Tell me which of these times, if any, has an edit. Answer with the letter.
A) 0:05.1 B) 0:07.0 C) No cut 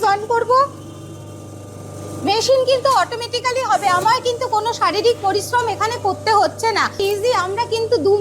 B